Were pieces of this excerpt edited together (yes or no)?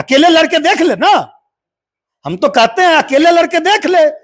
no